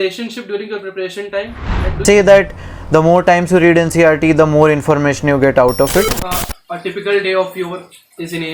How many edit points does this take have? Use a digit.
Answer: 2